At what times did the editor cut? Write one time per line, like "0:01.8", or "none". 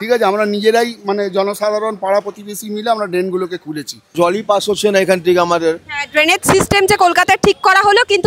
0:04.1